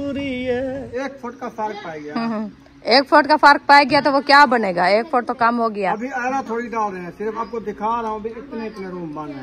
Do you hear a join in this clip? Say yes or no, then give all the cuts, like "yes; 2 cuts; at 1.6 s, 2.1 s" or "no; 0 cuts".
yes; 2 cuts; at 1.0 s, 7.4 s